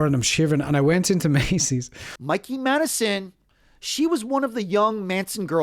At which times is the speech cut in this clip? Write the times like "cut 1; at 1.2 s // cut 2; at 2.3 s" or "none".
cut 1; at 2.0 s // cut 2; at 3.3 s